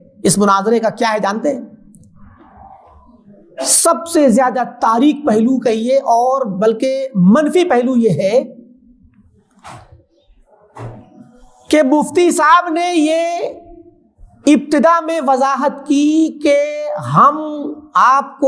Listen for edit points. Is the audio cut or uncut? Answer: uncut